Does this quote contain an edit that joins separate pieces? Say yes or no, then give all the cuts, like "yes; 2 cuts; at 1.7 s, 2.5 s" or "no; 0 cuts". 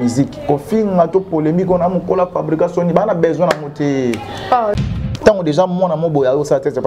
yes; 1 cut; at 4.8 s